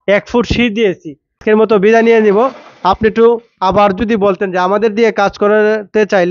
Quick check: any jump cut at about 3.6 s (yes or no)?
no